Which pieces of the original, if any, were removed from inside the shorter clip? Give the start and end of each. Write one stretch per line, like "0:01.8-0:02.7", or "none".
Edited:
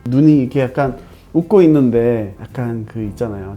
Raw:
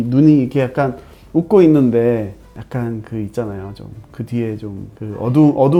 0:02.4-0:02.6